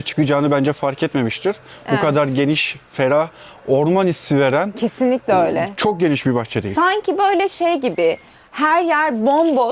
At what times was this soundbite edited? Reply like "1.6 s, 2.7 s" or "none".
none